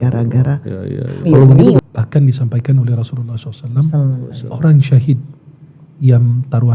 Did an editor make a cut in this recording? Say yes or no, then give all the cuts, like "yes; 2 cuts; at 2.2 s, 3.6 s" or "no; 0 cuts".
yes; 1 cut; at 1.8 s